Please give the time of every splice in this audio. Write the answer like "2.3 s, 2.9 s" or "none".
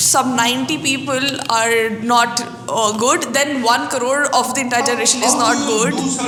none